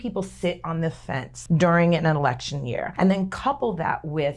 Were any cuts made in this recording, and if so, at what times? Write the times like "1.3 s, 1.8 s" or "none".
1.3 s, 2.8 s